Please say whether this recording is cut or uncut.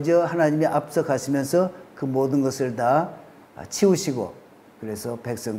uncut